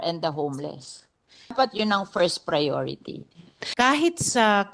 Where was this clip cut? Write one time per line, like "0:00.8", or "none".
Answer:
0:01.5
0:03.6

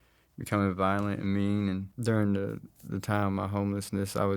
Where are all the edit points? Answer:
0:01.9

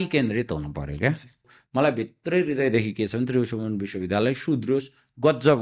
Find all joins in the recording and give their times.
0:01.6

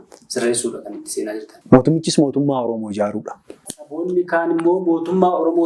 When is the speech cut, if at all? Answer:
0:01.5
0:03.8

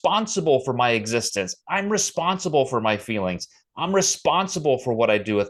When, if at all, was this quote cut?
none

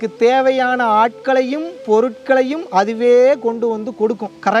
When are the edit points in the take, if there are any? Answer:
none

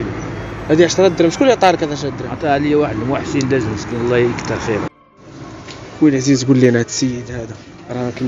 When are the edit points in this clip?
0:05.0

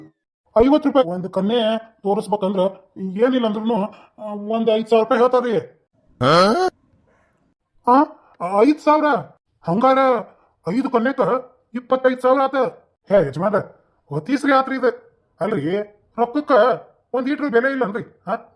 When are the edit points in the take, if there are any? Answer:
0:01.0

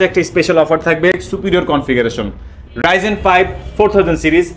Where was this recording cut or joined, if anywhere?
none

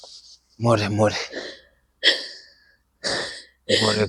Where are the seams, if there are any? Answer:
none

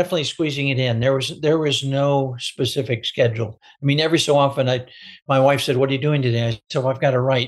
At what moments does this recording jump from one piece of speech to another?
none

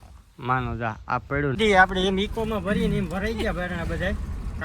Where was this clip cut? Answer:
0:01.6

